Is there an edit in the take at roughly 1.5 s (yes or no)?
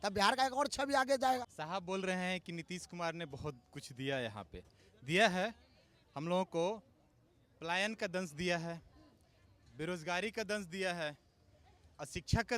yes